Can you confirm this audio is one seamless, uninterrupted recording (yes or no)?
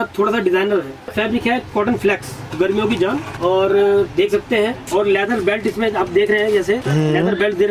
no